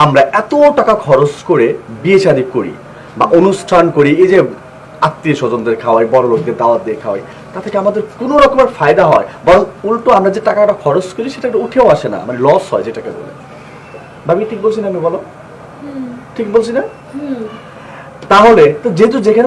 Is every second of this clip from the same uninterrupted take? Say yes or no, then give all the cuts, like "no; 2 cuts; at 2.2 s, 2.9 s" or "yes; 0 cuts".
yes; 0 cuts